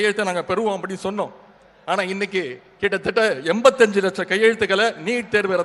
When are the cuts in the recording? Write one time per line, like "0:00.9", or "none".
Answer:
none